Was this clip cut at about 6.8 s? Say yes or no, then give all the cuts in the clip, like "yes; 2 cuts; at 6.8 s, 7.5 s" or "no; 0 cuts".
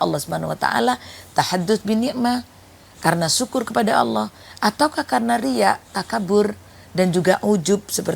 no; 0 cuts